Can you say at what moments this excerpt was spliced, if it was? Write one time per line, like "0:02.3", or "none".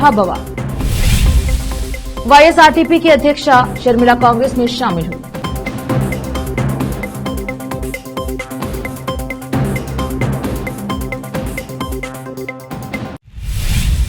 0:13.1